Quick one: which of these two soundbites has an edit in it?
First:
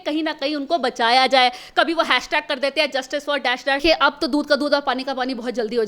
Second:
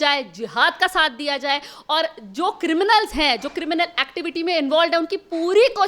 first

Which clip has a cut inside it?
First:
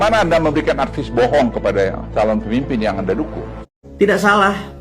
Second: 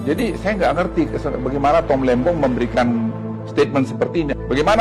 first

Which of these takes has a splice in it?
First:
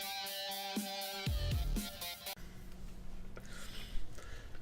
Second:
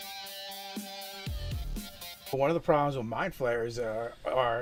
first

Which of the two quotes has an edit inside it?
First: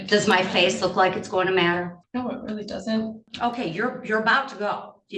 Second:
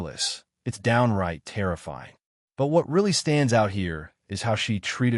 first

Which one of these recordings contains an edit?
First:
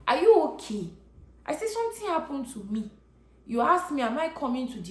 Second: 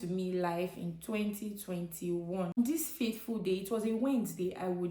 second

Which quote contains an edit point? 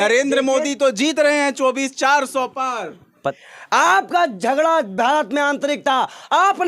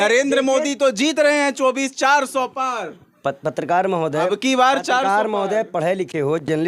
first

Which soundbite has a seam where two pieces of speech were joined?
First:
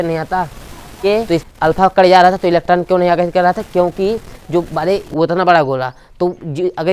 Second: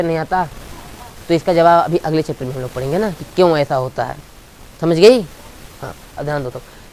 first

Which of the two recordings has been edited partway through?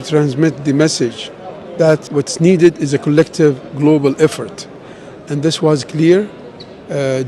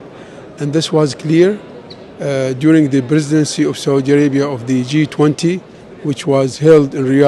first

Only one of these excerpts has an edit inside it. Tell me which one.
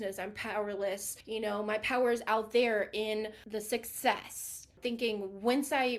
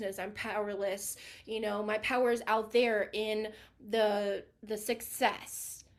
first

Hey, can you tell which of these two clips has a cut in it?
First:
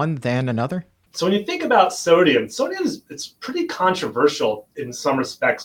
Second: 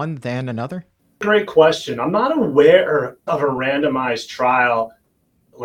first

